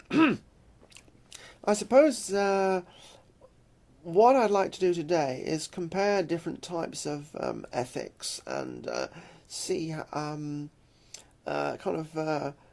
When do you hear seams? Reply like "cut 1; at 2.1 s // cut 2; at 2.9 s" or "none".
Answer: cut 1; at 2.1 s

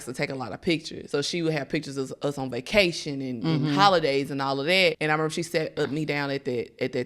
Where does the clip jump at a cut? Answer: cut 1; at 0.9 s // cut 2; at 5.0 s

